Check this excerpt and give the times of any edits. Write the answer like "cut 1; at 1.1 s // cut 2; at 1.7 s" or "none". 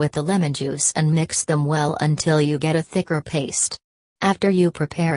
cut 1; at 2.4 s